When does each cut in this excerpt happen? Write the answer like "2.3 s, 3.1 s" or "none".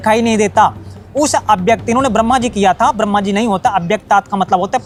none